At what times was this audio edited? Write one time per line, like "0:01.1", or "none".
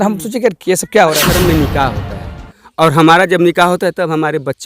0:01.3